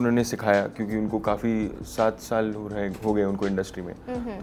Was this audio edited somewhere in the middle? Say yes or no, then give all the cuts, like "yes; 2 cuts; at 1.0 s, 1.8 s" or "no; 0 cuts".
no; 0 cuts